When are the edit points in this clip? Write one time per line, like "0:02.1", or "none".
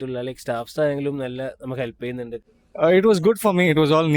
0:02.4